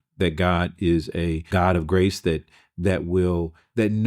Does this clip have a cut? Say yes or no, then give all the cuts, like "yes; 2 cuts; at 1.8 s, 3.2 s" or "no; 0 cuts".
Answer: yes; 1 cut; at 1.5 s